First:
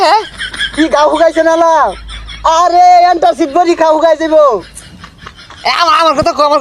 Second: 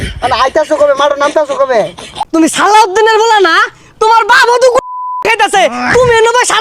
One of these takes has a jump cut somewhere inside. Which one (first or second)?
second